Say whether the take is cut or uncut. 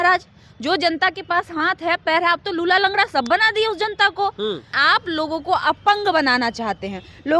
cut